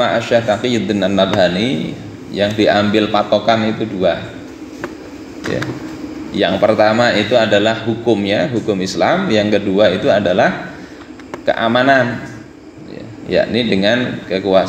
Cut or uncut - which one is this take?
uncut